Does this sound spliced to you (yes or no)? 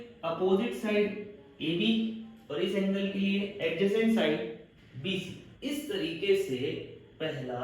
yes